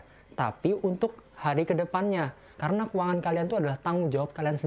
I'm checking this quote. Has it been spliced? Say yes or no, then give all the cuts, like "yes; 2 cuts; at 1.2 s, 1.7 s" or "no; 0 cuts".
yes; 1 cut; at 2.5 s